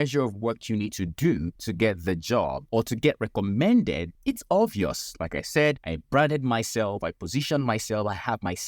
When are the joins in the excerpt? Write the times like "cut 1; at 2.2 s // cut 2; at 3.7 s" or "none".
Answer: cut 1; at 1.6 s // cut 2; at 2.6 s // cut 3; at 4.1 s // cut 4; at 5.9 s